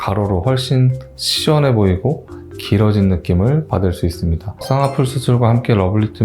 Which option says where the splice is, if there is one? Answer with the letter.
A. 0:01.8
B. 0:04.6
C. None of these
B